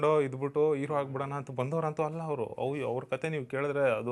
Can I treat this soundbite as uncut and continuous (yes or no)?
yes